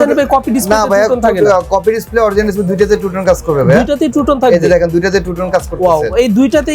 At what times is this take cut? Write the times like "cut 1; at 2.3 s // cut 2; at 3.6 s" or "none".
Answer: none

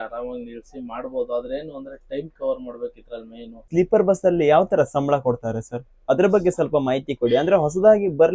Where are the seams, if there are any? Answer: cut 1; at 3.7 s

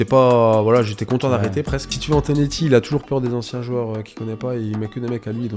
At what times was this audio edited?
cut 1; at 2.0 s

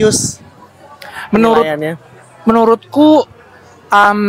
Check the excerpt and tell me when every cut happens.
none

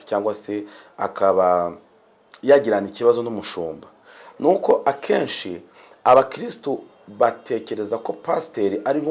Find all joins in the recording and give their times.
none

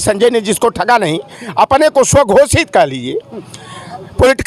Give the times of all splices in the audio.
none

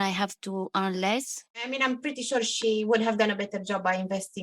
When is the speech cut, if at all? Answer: cut 1; at 1.7 s

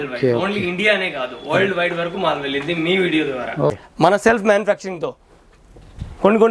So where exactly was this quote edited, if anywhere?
cut 1; at 3.7 s

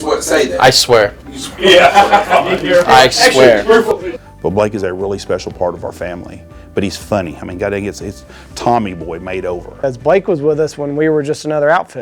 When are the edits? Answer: cut 1; at 3.9 s // cut 2; at 9.8 s

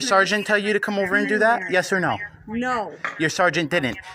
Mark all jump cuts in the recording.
none

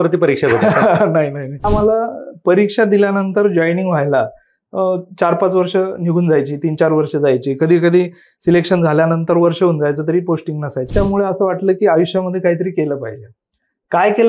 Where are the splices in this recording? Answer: cut 1; at 1.7 s // cut 2; at 10.9 s

